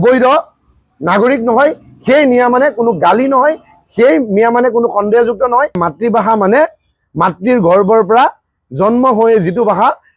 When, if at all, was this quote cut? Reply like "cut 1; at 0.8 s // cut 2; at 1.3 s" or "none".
cut 1; at 5.7 s